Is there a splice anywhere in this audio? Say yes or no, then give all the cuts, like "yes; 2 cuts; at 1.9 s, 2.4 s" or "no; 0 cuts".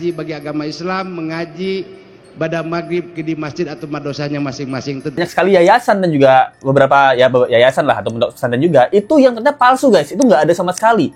yes; 1 cut; at 5.2 s